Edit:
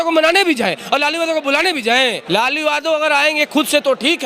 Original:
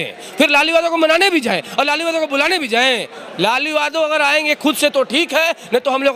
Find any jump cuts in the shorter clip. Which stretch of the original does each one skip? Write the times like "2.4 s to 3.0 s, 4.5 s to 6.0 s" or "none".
3.1 s to 3.3 s

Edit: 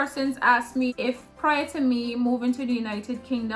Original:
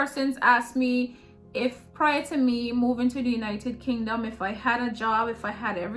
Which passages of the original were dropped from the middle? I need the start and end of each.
0.9 s to 1.5 s

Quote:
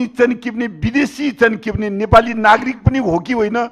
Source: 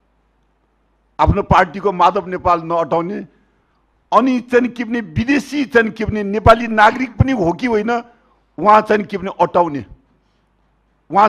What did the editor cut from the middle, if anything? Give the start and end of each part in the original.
none

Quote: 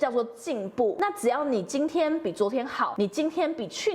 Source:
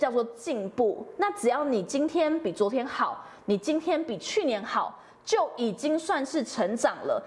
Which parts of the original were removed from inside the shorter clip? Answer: 1.0 s to 1.2 s, 3.1 s to 3.4 s

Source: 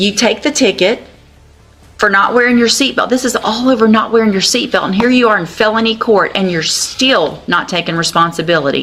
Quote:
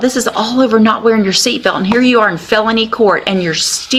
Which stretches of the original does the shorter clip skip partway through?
none

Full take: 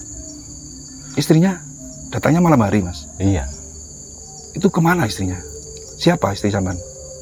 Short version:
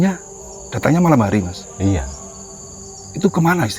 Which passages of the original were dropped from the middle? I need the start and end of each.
none

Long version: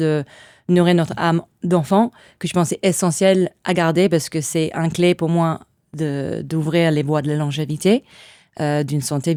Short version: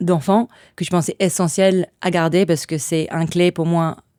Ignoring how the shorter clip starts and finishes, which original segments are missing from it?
none

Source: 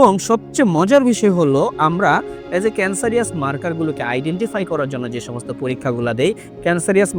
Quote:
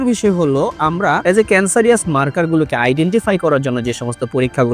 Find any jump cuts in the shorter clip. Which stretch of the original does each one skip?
2.2 s to 2.5 s

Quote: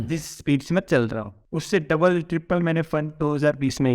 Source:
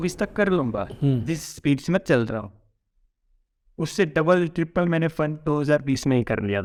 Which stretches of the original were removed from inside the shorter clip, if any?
2.5 s to 3.6 s

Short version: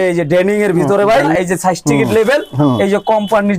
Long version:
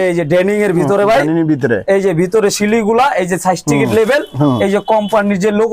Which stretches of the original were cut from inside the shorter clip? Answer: 1.3 s to 3.1 s

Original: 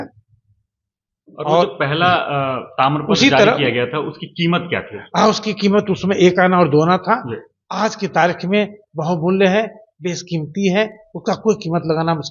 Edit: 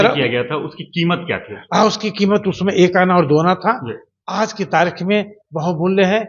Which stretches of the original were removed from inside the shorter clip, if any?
none

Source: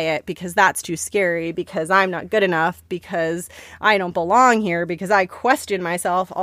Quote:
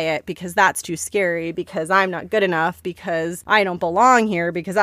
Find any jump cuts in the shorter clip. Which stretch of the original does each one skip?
3.0 s to 3.4 s

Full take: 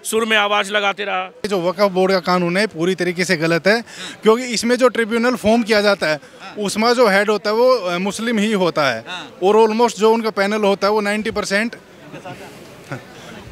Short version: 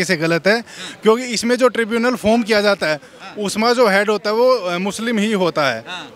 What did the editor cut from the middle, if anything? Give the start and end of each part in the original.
none

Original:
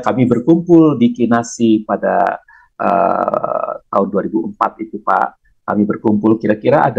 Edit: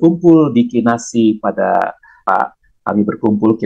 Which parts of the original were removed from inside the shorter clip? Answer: 2.5 s to 4.9 s

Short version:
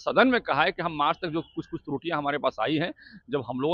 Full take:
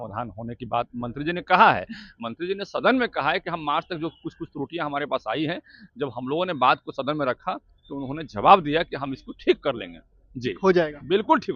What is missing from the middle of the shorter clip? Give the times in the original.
none

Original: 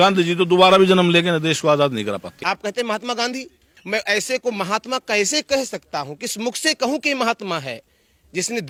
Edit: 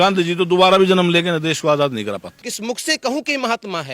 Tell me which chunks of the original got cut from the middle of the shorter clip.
2.3 s to 6.1 s

